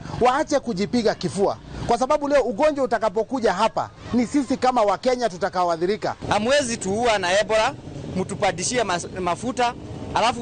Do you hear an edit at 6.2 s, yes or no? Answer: yes